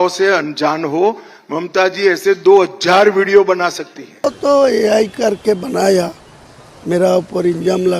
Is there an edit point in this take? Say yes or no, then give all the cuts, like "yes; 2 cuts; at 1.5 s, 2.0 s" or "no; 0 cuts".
yes; 1 cut; at 4.2 s